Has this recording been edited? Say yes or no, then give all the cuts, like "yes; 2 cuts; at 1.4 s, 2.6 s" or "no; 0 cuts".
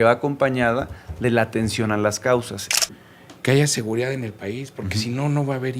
yes; 1 cut; at 2.7 s